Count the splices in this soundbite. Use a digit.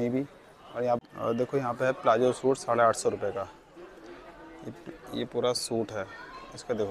1